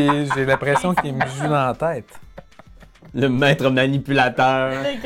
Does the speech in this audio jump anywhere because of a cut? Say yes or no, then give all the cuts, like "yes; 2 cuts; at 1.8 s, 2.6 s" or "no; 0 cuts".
no; 0 cuts